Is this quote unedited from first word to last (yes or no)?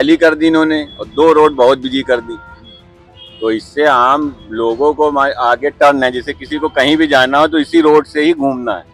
yes